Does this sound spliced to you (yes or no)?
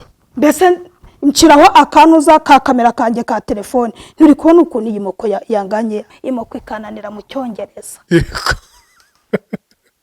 yes